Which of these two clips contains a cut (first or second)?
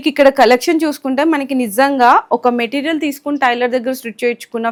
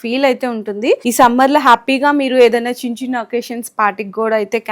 second